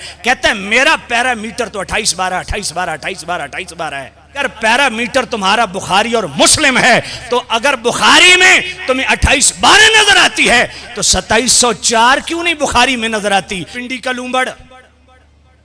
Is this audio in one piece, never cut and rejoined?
no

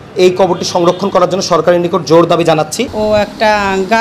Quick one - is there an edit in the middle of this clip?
yes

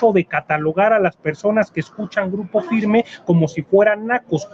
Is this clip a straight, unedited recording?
yes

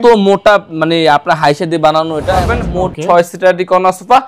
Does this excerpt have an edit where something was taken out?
yes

